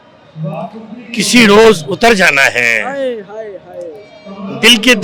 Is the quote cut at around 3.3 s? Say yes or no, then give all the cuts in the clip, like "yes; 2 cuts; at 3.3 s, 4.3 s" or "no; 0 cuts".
no; 0 cuts